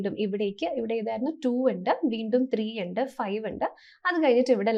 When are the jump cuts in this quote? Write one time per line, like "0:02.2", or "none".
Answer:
none